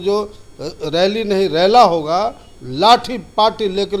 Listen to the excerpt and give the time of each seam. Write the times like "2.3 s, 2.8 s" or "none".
none